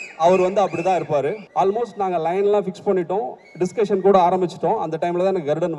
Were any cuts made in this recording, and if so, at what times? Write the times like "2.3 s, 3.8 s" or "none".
1.4 s